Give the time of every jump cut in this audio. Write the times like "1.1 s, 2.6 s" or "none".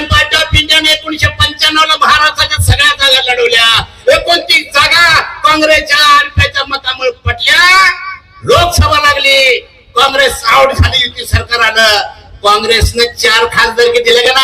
none